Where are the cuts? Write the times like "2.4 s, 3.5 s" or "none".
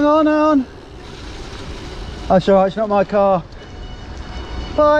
none